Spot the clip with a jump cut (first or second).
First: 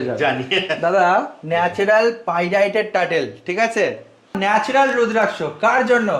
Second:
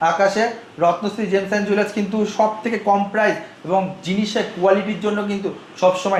first